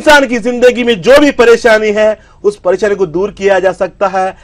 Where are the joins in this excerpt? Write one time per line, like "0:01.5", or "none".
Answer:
none

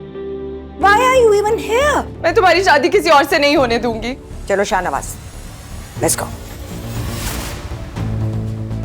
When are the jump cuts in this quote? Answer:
0:02.1
0:04.3

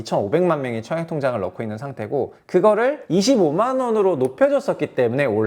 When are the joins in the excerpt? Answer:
0:02.4
0:03.0

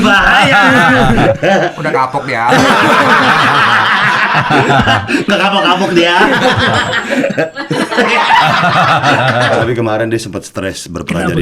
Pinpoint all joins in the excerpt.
0:09.6

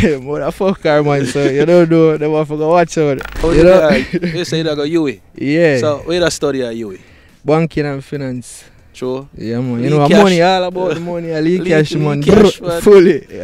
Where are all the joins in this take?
0:03.4

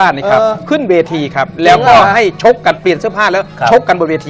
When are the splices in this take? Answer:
0:01.6

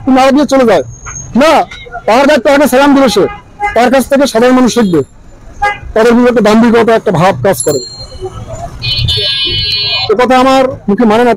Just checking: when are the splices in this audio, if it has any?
none

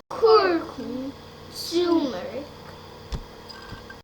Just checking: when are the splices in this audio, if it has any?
0:02.6

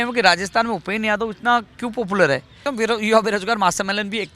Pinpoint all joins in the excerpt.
0:02.5

